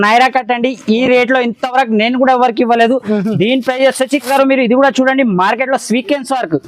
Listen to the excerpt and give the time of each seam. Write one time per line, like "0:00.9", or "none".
0:04.3